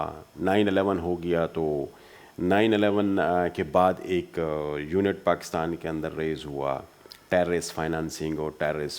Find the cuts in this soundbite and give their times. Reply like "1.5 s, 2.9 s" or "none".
none